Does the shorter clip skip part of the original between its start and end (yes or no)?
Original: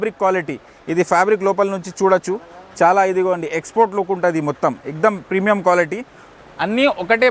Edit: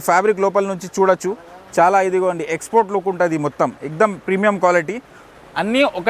no